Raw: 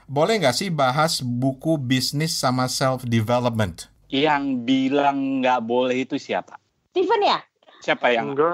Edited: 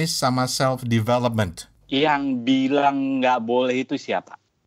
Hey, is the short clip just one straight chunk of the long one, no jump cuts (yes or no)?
yes